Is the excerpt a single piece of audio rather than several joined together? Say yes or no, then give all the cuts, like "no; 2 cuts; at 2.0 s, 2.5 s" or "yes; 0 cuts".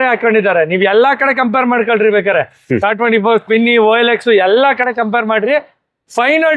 yes; 0 cuts